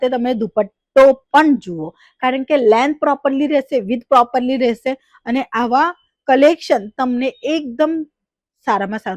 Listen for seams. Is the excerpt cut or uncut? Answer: uncut